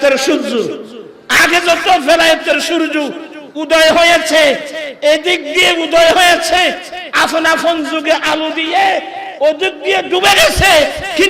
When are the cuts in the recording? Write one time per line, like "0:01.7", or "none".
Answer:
none